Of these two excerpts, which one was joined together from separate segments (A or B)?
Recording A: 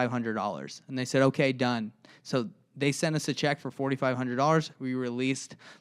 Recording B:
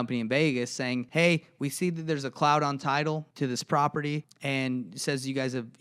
B